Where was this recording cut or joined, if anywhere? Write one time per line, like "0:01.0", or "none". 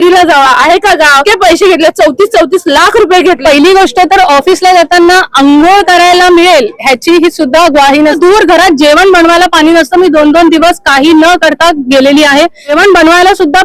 0:01.2
0:03.4
0:08.2
0:12.7